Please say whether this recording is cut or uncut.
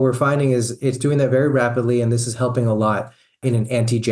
uncut